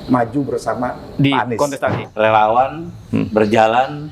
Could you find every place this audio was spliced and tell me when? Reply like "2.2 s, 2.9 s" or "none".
2.0 s